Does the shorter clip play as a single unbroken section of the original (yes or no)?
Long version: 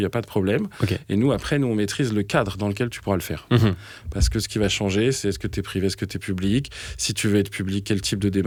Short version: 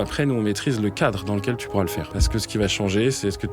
no